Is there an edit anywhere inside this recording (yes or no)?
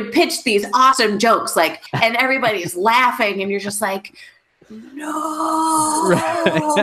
yes